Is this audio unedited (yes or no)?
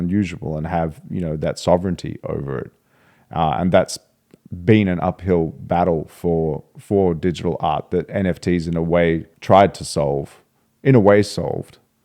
no